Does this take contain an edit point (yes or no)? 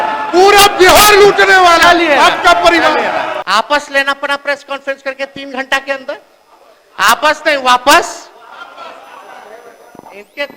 yes